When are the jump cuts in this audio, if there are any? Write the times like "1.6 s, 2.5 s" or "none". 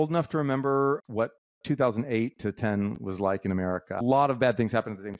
1.0 s, 4.0 s